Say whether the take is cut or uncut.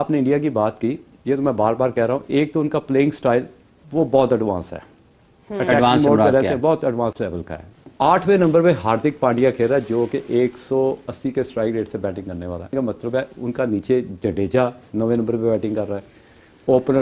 cut